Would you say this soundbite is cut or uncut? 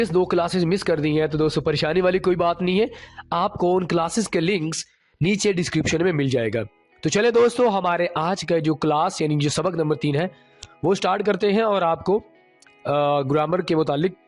uncut